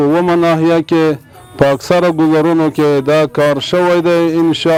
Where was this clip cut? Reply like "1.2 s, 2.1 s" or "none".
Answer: none